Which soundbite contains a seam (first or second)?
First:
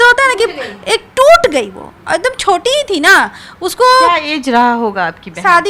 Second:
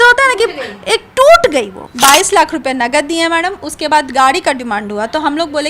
second